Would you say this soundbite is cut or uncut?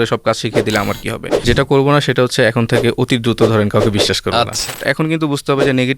cut